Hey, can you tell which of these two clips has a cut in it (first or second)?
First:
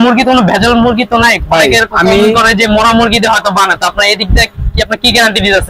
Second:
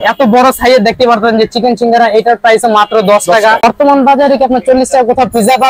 second